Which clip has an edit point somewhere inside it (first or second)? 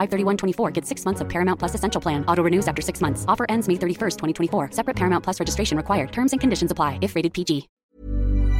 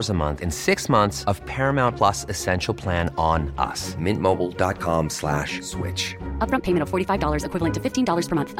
first